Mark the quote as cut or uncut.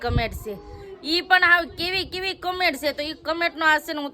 uncut